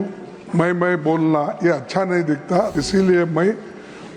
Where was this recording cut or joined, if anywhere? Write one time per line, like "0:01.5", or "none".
0:02.8